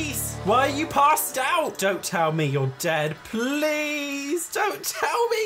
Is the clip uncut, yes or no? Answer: yes